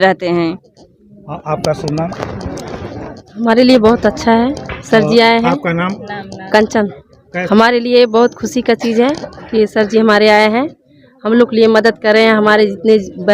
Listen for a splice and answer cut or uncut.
cut